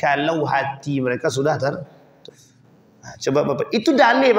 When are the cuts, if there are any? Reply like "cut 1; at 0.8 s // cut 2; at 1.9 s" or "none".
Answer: cut 1; at 2.1 s